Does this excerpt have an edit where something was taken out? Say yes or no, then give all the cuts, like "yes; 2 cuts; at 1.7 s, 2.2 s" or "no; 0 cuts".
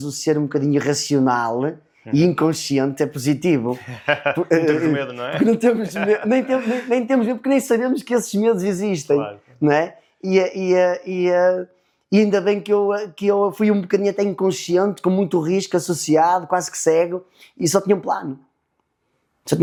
no; 0 cuts